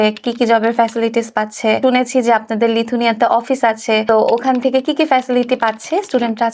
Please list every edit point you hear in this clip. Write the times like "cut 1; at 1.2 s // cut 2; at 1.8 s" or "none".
cut 1; at 1.8 s // cut 2; at 4.0 s